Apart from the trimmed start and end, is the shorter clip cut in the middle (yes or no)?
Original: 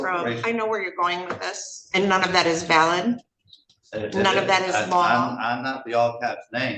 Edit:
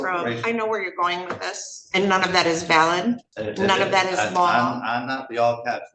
yes